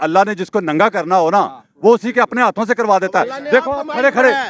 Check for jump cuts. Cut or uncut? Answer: uncut